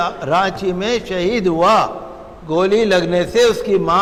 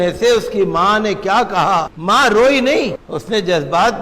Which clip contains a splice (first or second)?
second